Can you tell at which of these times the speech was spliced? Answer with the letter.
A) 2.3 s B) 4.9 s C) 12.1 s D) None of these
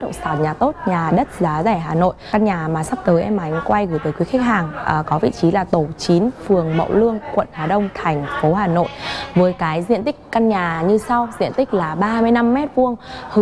A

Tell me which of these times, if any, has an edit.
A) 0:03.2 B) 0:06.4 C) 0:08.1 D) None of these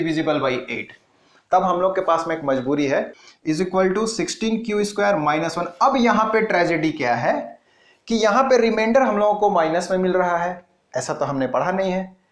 A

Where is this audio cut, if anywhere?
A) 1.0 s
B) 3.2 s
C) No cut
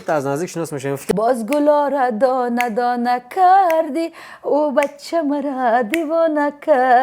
A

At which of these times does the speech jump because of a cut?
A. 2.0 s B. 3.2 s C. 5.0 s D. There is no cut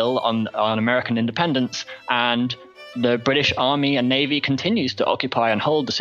D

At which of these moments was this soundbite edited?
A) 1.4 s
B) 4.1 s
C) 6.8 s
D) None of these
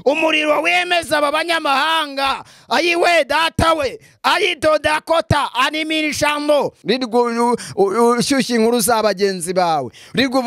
C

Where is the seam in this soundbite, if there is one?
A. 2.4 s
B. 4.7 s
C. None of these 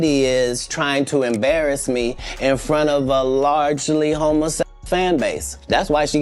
B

